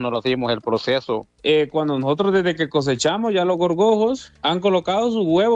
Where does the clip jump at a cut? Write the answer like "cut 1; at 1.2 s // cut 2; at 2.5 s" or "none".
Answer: cut 1; at 1.3 s